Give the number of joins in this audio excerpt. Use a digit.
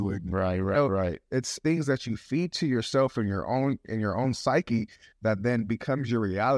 1